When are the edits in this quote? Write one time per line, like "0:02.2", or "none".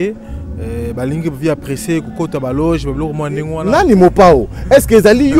0:03.3